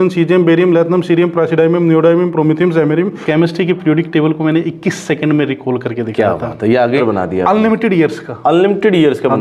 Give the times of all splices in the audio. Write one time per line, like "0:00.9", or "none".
0:03.2
0:07.0